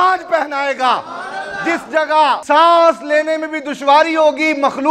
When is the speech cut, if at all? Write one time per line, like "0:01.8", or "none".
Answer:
0:02.4

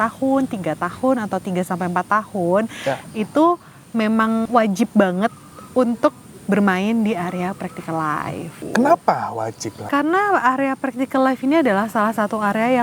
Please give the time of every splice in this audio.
0:04.5
0:08.6
0:09.9

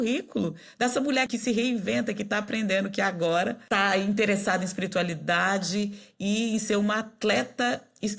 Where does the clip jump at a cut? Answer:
0:01.3
0:03.6

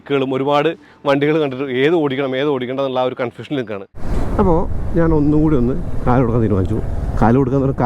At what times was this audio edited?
0:03.9

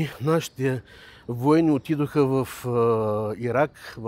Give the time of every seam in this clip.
none

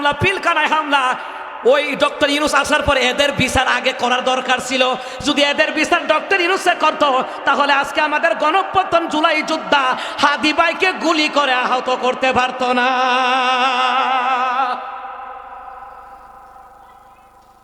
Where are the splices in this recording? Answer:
none

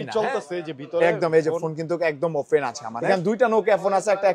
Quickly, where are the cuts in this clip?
0:02.9

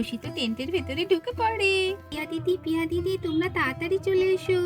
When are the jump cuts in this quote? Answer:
0:02.1

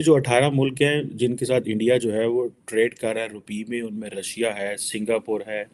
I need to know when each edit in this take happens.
none

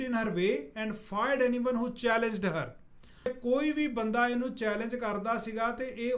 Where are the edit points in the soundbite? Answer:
0:03.3

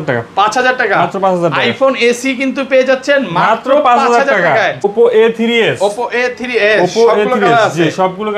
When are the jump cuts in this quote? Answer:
0:04.9

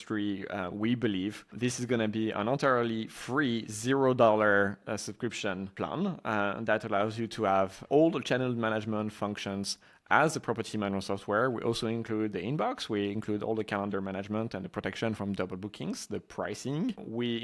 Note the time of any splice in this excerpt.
0:07.8

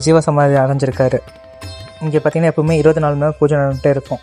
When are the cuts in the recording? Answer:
none

